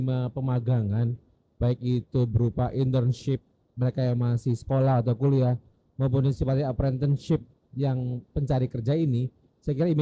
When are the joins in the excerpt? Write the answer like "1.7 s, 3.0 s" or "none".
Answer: none